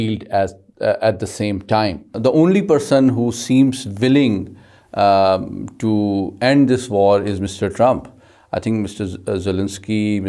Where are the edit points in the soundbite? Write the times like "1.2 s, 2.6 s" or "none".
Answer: 2.1 s